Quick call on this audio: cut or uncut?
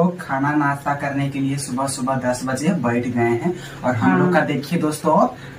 uncut